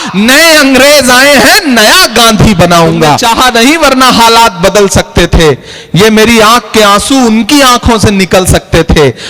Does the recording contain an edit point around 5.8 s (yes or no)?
no